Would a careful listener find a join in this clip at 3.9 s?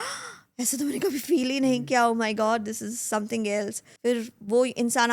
yes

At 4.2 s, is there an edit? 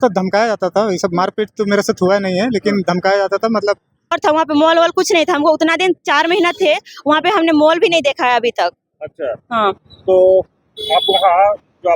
yes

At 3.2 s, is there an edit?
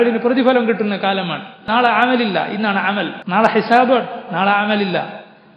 yes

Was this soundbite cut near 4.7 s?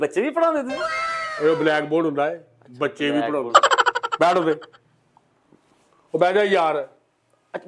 no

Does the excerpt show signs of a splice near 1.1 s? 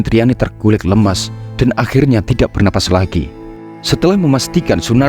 no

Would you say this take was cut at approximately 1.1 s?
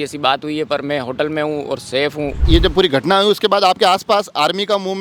no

